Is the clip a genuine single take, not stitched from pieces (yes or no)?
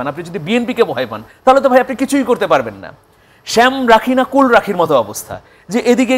yes